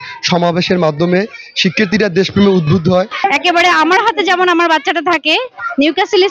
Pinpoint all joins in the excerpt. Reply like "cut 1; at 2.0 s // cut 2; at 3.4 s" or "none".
cut 1; at 3.2 s